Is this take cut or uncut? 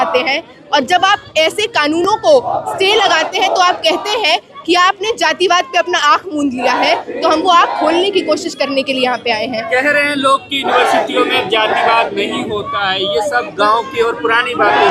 uncut